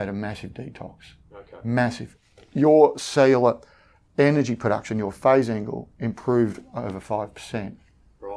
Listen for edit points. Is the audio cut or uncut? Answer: cut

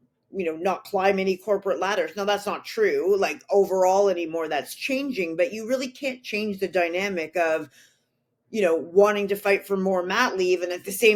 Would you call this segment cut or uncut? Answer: uncut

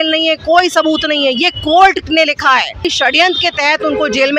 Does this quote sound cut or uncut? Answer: cut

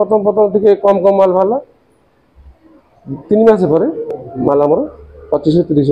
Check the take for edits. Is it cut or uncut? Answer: uncut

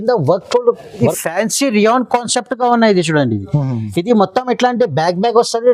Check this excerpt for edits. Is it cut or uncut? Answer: cut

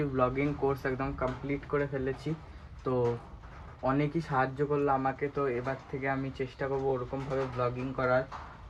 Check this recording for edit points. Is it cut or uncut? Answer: uncut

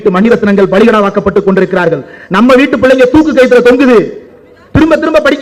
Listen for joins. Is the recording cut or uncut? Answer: uncut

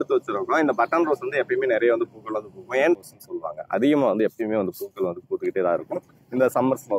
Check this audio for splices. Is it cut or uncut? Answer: cut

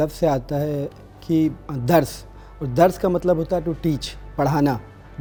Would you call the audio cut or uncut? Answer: uncut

